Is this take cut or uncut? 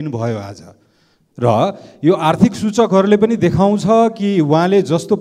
uncut